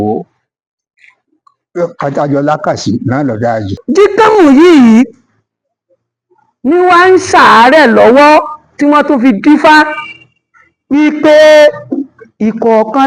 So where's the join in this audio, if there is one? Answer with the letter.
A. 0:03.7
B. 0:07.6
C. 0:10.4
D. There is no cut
A